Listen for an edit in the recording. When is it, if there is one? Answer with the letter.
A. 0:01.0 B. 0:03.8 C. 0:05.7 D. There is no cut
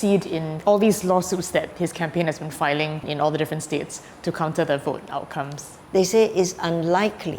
C